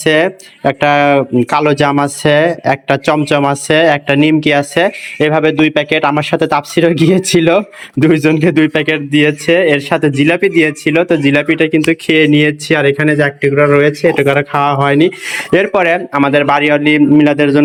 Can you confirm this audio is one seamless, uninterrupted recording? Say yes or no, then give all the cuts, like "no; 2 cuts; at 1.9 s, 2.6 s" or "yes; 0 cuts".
yes; 0 cuts